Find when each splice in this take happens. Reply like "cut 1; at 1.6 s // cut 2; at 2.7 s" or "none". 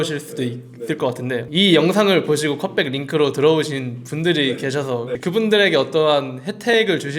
cut 1; at 1.5 s

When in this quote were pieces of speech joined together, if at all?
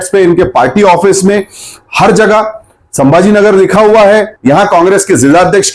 cut 1; at 4.3 s

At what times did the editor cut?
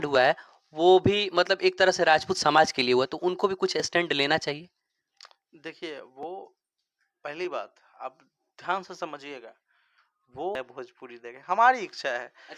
cut 1; at 10.5 s

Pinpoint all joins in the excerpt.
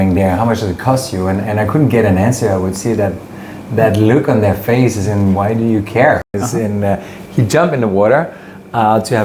cut 1; at 6.3 s

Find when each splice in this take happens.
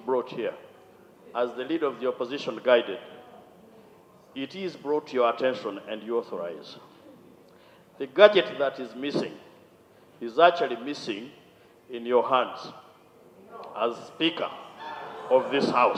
none

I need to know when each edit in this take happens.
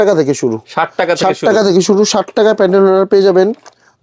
none

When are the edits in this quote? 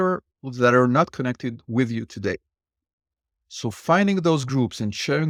none

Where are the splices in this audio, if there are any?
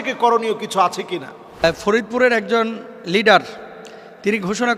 cut 1; at 1.6 s

